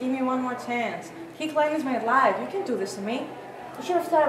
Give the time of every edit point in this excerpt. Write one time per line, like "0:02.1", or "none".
none